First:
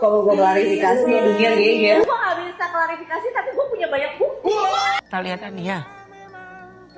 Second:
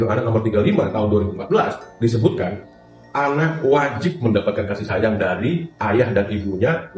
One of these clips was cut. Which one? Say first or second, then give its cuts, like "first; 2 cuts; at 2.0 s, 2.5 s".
first; 2 cuts; at 2.0 s, 5.0 s